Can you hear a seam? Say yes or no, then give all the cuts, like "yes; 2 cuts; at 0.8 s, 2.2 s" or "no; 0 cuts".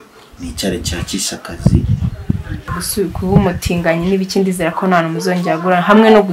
yes; 1 cut; at 2.8 s